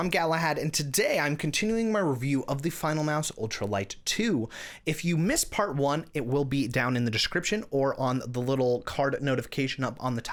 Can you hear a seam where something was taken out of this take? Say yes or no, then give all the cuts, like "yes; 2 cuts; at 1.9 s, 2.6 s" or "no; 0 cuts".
no; 0 cuts